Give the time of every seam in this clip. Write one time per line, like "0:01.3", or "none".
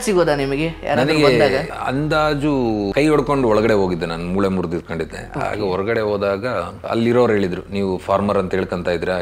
0:01.7
0:02.9
0:06.8